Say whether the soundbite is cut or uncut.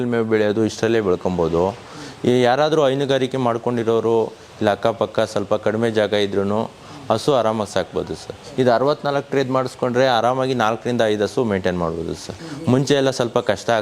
uncut